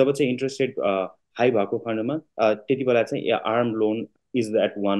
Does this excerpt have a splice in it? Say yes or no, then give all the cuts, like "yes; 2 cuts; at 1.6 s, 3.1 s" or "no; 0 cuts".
no; 0 cuts